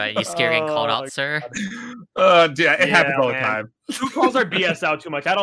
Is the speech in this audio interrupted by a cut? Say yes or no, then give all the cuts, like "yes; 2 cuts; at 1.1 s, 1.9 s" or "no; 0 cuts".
no; 0 cuts